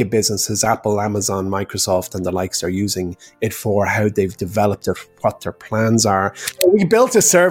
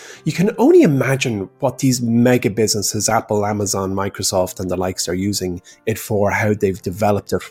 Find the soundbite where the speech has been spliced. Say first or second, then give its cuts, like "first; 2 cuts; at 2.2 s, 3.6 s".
first; 1 cut; at 6.5 s